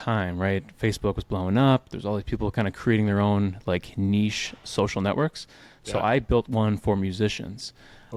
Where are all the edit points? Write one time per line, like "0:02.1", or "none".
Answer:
none